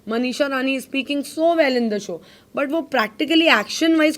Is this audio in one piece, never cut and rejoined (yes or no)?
yes